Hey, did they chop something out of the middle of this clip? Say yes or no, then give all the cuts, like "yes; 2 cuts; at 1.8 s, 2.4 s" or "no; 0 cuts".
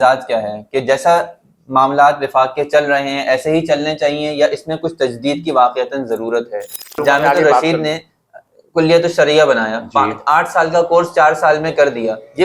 yes; 1 cut; at 6.9 s